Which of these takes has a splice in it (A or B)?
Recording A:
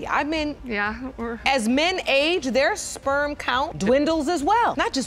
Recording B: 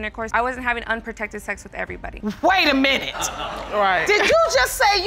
B